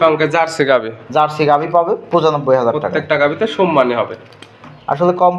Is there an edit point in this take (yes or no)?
no